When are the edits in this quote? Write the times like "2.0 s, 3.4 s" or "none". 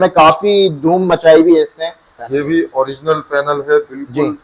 2.2 s

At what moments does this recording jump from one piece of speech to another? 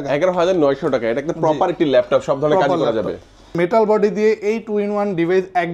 3.5 s

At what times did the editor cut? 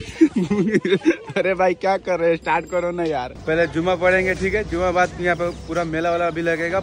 3.3 s

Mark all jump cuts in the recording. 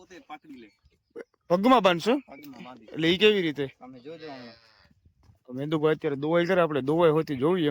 none

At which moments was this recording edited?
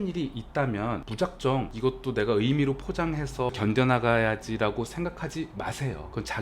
1.1 s, 1.7 s, 3.5 s

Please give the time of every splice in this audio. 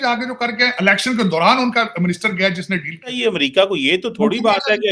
3.2 s

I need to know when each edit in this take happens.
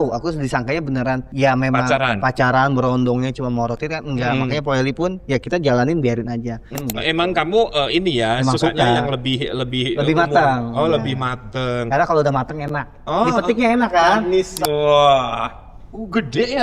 1.3 s, 6.8 s, 14.5 s

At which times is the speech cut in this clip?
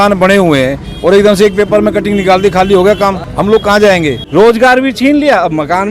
4.2 s

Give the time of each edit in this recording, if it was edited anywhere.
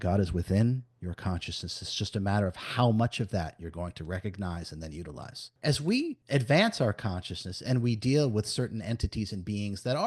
5.5 s, 6.2 s

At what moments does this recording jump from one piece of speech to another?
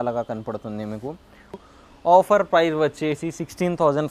1.6 s

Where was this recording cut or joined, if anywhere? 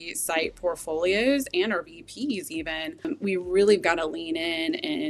3.1 s

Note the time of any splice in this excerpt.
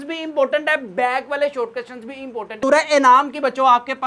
2.6 s

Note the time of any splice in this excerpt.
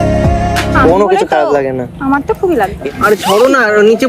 2.8 s

